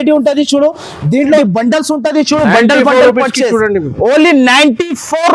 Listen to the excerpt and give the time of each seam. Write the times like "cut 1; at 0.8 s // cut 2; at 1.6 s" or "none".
cut 1; at 1.4 s